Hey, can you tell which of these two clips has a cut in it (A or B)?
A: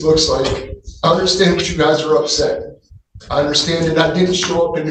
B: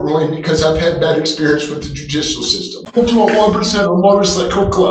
B